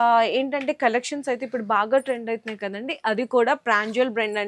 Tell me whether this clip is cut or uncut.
uncut